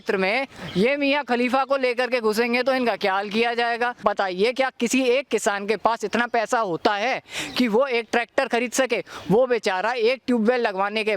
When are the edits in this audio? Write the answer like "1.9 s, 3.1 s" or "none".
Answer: 4.0 s